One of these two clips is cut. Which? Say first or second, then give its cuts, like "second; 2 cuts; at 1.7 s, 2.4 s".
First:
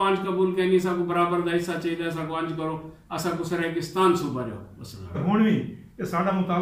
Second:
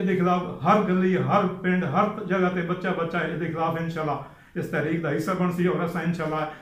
first; 1 cut; at 5.2 s